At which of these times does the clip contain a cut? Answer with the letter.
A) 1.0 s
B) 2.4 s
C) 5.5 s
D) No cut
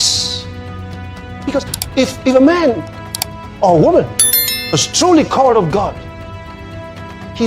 A